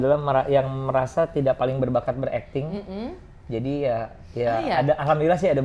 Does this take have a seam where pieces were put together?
no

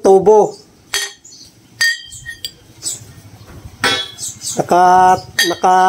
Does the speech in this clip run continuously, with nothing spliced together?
yes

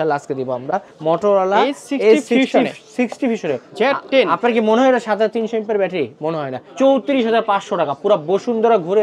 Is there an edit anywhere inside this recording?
yes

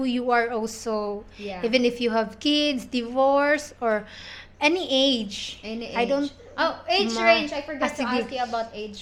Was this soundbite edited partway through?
no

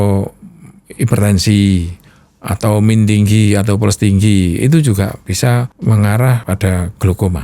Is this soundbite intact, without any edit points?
no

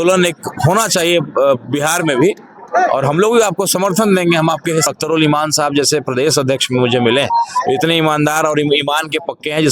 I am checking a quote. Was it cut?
yes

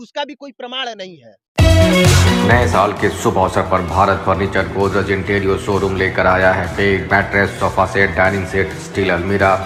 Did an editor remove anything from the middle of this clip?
no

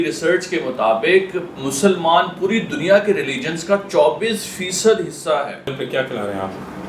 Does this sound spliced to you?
yes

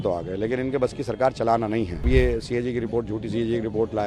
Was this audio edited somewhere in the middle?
yes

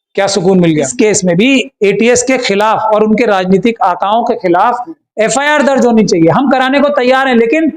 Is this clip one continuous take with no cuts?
no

